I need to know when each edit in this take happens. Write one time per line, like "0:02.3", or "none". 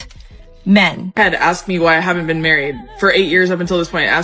0:01.0